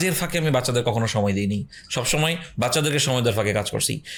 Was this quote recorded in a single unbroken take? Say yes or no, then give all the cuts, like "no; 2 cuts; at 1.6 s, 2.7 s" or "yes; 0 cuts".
yes; 0 cuts